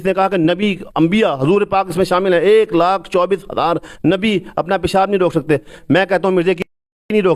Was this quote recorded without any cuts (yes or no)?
yes